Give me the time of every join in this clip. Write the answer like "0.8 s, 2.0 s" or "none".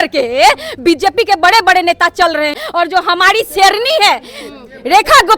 2.6 s